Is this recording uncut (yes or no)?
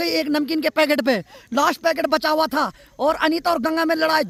yes